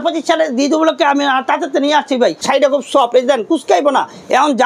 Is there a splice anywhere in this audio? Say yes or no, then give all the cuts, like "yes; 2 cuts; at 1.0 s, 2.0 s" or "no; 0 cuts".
yes; 1 cut; at 2.4 s